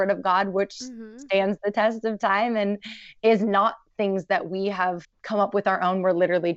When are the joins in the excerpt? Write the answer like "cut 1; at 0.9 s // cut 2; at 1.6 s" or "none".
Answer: cut 1; at 5.1 s